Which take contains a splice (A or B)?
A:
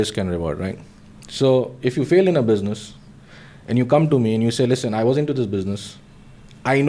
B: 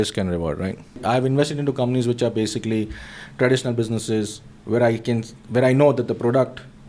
B